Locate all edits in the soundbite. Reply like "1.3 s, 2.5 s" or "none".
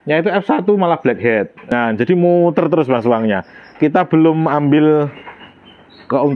1.7 s